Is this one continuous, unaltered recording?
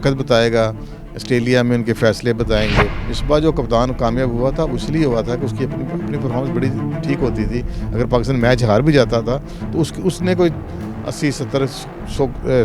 no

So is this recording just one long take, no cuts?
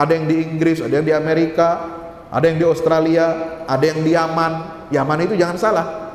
yes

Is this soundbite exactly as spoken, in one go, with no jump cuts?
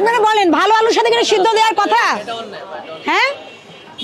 yes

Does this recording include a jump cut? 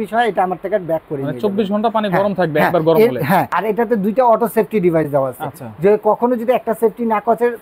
yes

